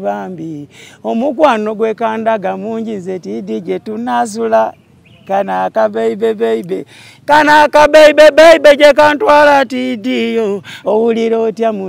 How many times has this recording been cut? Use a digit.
1